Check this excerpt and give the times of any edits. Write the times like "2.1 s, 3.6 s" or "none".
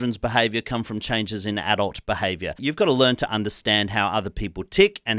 2.6 s

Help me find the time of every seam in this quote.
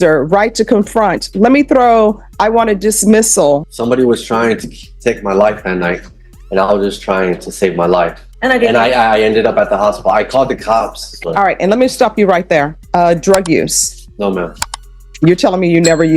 3.6 s, 8.2 s, 11.1 s, 12.8 s

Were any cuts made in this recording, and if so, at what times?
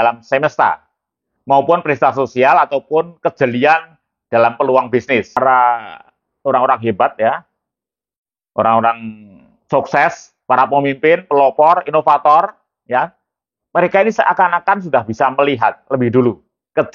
5.4 s

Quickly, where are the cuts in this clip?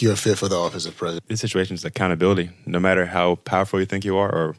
1.2 s

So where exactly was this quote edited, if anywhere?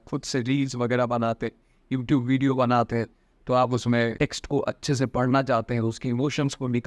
4.1 s

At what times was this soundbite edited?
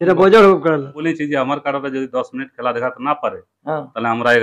1.0 s

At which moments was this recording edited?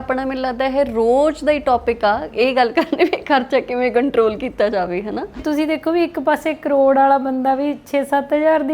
5.4 s

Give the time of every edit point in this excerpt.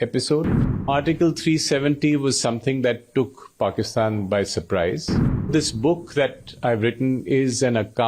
0.9 s, 5.5 s

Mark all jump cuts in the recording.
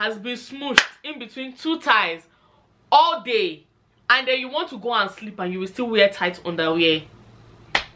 none

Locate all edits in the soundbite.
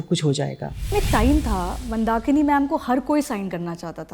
0.9 s

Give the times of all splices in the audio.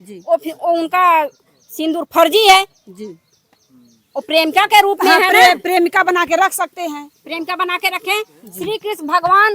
none

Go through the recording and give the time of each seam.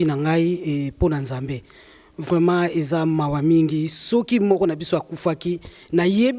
none

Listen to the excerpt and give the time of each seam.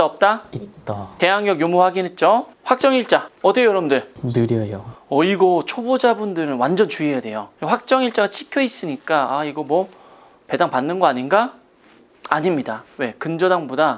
1.0 s

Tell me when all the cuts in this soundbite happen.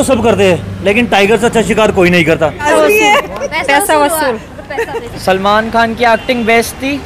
2.6 s, 5.0 s

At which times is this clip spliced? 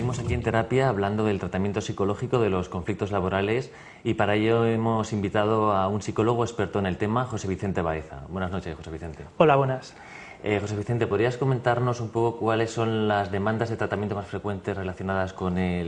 none

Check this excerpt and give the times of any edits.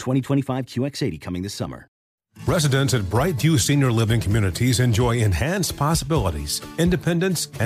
2.0 s

